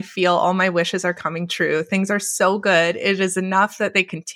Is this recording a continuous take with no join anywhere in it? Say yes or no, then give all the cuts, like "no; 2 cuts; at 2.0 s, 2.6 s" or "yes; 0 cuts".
yes; 0 cuts